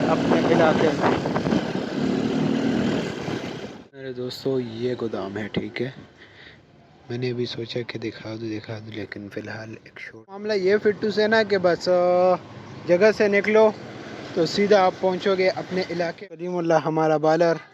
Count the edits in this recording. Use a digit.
3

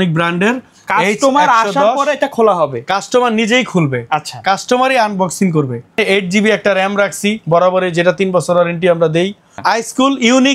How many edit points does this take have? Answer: 2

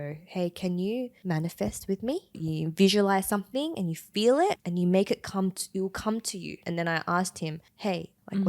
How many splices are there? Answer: 4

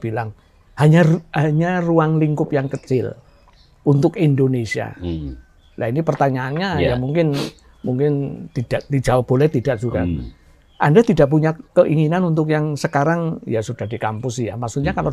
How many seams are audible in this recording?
0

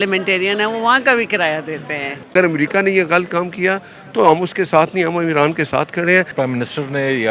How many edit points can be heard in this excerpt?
2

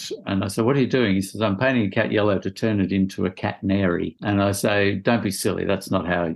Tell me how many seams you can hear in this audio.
1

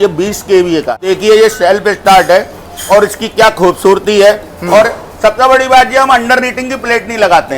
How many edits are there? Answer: 1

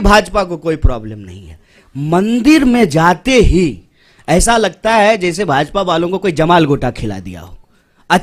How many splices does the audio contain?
0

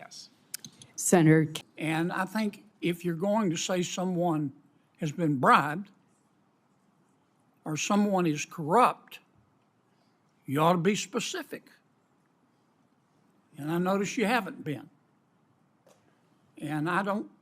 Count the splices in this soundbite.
1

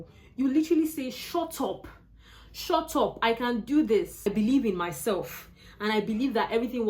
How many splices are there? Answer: 1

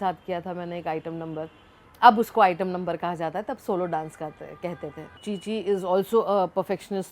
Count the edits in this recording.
1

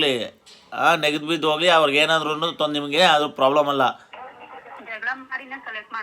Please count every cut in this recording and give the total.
1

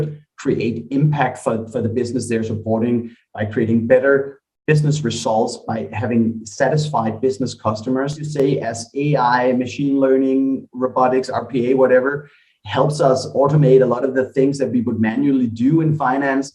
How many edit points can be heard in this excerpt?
1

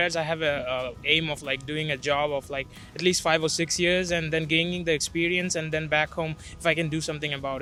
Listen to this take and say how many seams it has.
0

